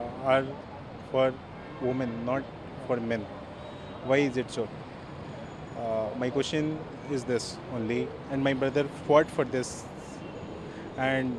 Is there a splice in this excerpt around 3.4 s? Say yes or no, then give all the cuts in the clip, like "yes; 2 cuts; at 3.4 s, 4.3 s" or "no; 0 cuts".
no; 0 cuts